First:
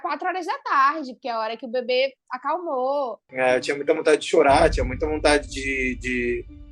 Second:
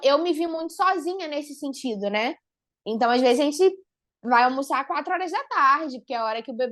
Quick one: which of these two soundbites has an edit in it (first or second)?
first